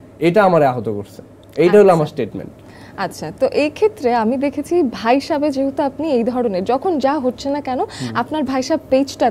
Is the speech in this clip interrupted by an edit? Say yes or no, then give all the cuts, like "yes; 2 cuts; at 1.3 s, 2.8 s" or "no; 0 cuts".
no; 0 cuts